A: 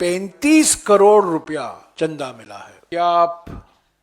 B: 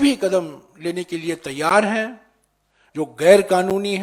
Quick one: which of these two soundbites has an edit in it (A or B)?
A